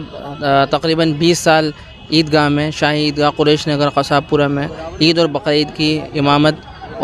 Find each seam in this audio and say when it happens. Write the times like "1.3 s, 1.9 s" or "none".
none